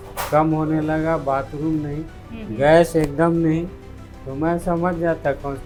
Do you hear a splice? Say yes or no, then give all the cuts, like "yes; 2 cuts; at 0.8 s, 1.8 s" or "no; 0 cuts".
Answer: no; 0 cuts